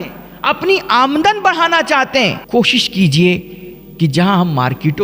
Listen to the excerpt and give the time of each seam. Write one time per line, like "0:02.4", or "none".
0:02.4